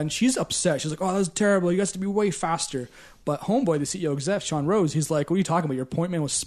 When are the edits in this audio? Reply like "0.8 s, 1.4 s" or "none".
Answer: none